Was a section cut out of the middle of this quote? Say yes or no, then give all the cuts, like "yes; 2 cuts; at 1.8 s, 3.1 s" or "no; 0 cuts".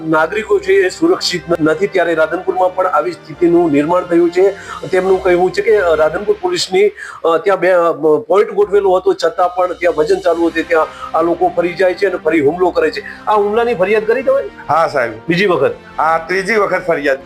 yes; 1 cut; at 1.6 s